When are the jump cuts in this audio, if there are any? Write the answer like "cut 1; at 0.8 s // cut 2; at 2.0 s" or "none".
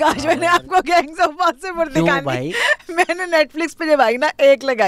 none